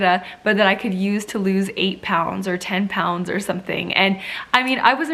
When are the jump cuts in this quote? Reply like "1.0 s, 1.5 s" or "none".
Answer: none